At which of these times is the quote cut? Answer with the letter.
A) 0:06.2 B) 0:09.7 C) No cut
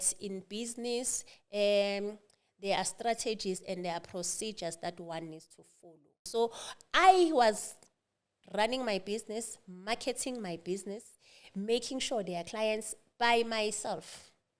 A